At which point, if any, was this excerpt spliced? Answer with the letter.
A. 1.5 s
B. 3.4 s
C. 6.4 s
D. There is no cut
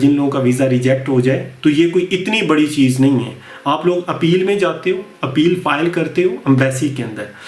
D